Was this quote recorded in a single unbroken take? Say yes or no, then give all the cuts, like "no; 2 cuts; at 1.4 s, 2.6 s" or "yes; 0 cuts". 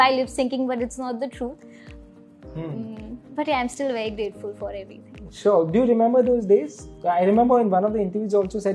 yes; 0 cuts